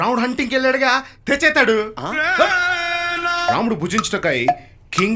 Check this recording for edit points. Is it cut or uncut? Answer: cut